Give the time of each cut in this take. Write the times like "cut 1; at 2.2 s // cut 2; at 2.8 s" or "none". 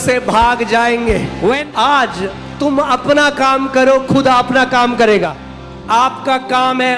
cut 1; at 1.6 s // cut 2; at 5.4 s